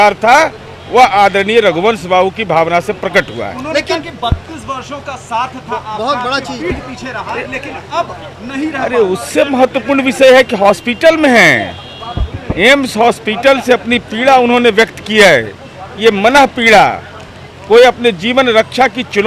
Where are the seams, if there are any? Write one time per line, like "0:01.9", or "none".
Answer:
none